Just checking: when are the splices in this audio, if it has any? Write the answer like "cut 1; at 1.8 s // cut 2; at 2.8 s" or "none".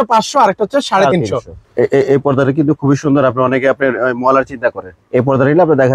cut 1; at 1.7 s // cut 2; at 4.9 s